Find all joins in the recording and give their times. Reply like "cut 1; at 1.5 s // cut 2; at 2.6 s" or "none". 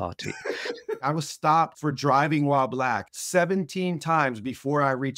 cut 1; at 1.0 s // cut 2; at 1.7 s // cut 3; at 3.1 s